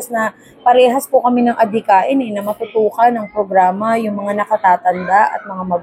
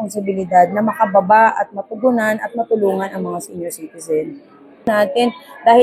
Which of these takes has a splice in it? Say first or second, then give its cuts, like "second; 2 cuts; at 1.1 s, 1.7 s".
second; 1 cut; at 4.9 s